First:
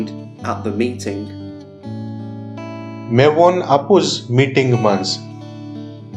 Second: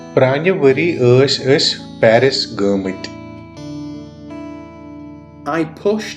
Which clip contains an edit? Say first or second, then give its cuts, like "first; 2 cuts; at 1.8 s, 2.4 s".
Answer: first; 1 cut; at 5.1 s